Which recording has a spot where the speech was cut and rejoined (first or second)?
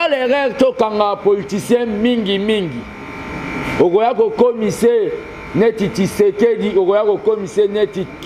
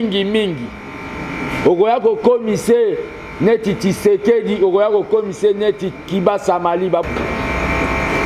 second